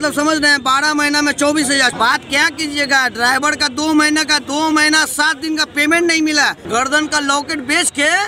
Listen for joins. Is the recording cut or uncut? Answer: cut